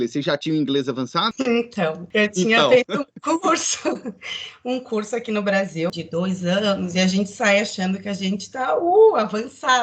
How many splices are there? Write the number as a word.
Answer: three